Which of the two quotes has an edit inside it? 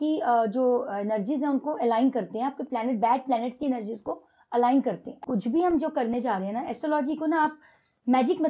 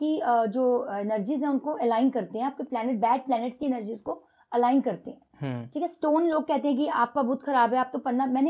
first; 1 cut; at 5.2 s

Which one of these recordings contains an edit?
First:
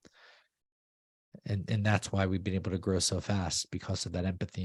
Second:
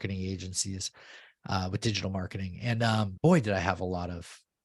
second; 1 cut; at 3.1 s

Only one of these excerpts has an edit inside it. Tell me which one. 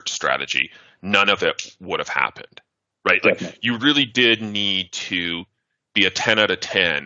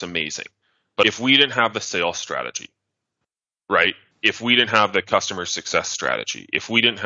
second; 1 cut; at 1.0 s

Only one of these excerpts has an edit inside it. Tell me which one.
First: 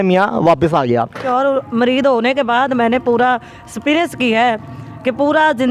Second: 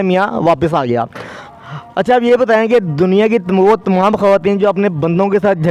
first; 1 cut; at 1.2 s

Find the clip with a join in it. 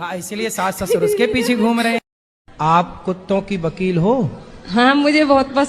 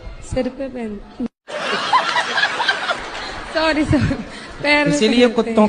first; 1 cut; at 2.1 s

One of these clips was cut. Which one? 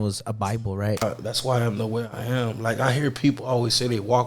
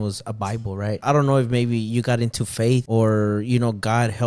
first; 1 cut; at 1.0 s

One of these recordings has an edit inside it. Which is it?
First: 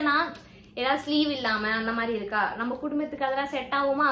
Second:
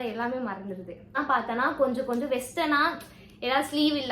second; 1 cut; at 1.1 s

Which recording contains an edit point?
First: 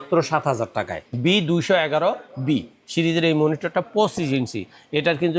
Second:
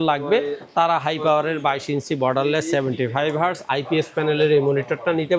first; 1 cut; at 1.0 s

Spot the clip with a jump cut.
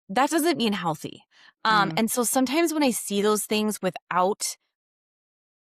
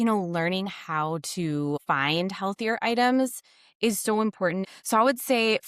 second; 2 cuts; at 1.8 s, 4.7 s

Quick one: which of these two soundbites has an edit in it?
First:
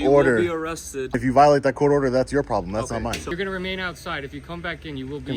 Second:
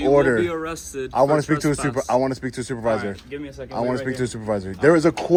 first; 2 cuts; at 1.1 s, 3.3 s

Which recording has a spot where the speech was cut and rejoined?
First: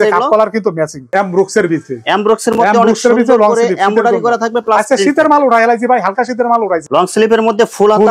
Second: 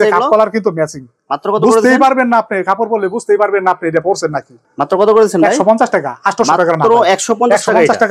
first; 2 cuts; at 1.0 s, 6.8 s

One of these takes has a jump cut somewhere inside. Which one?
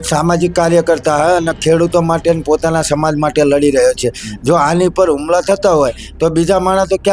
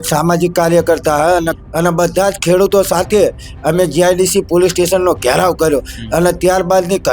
second; 1 cut; at 1.6 s

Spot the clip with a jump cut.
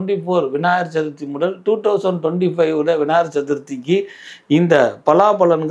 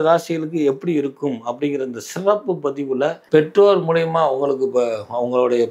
second; 1 cut; at 3.2 s

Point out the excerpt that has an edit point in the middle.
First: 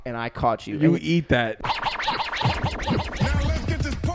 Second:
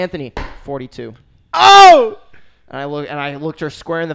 first; 1 cut; at 1.6 s

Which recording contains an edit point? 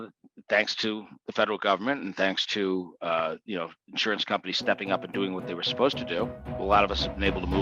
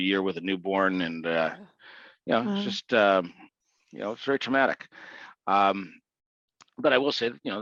first; 1 cut; at 6.4 s

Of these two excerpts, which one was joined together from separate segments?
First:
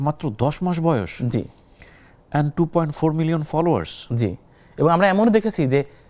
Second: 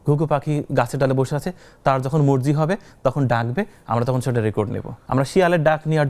second; 1 cut; at 4.9 s

